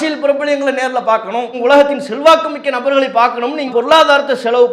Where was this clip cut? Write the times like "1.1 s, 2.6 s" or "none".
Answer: 1.5 s, 3.7 s